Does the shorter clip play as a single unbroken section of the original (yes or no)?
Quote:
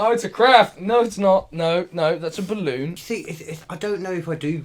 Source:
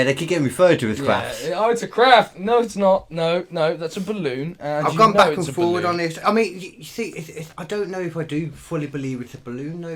no